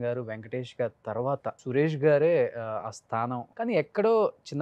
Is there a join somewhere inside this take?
yes; 2 cuts; at 1.6 s, 3.5 s

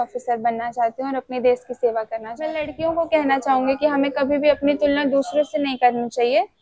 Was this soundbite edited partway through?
yes; 1 cut; at 2.7 s

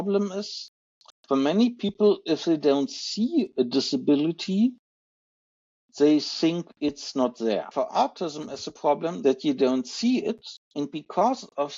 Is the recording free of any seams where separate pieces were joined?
no; 3 cuts; at 7.7 s, 9.2 s, 10.5 s

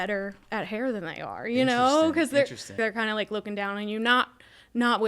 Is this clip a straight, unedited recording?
no; 1 cut; at 2.8 s

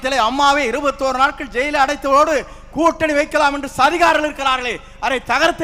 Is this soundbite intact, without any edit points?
yes; 0 cuts

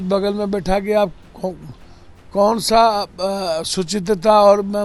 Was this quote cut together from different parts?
no; 0 cuts

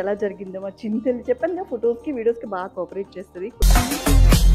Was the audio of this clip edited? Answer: yes; 1 cut; at 3.6 s

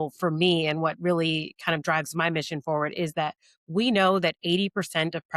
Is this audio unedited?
yes; 0 cuts

